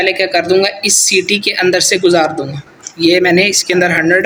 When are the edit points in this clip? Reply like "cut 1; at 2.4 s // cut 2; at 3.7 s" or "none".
none